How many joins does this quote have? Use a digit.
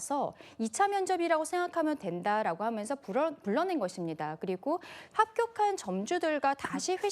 1